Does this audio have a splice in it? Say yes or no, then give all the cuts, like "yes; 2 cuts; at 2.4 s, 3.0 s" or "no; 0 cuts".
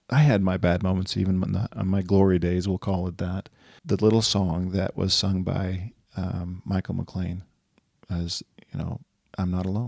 yes; 1 cut; at 3.8 s